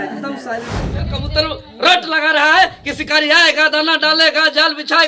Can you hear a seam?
yes; 1 cut; at 1.1 s

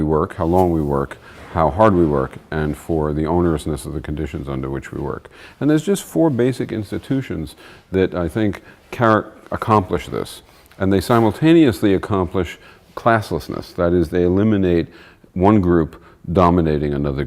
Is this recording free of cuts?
no; 1 cut; at 13.7 s

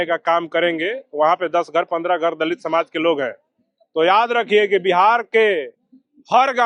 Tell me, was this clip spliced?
no; 0 cuts

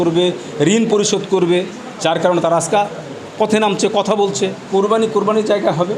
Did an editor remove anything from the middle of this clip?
yes; 1 cut; at 4.7 s

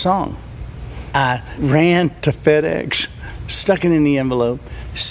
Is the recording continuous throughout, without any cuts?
no; 2 cuts; at 1.0 s, 2.2 s

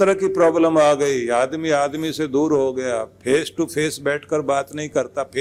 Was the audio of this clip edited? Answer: no; 0 cuts

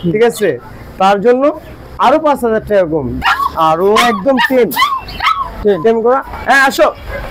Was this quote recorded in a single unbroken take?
no; 1 cut; at 3.2 s

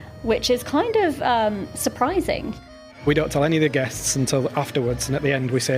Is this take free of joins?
no; 1 cut; at 2.6 s

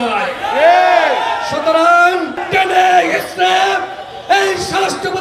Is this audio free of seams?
no; 1 cut; at 2.4 s

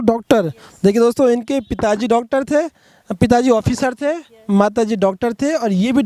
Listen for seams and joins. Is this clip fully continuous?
yes; 0 cuts

